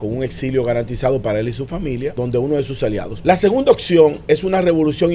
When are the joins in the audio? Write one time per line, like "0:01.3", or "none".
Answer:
0:02.2
0:03.1

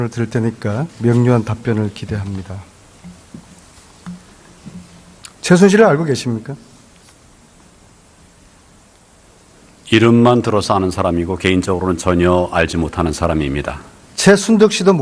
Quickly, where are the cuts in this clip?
0:07.1

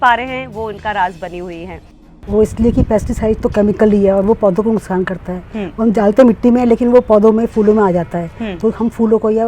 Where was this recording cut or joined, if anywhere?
0:01.8

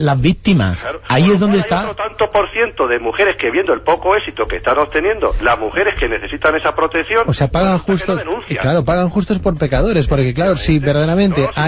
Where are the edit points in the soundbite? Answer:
0:09.7

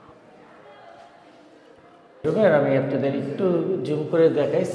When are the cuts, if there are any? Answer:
0:02.2

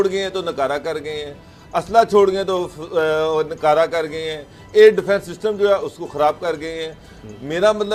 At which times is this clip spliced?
none

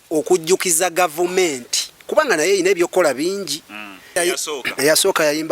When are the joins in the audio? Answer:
0:04.2

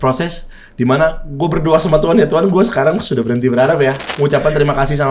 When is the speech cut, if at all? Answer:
0:04.1

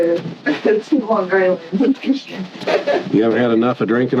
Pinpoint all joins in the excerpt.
0:02.5

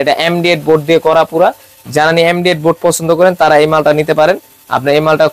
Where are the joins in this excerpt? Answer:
none

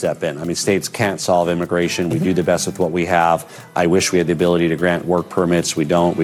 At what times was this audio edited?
0:03.7

